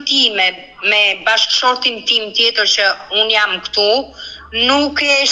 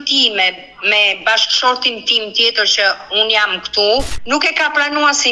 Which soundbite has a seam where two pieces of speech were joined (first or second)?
second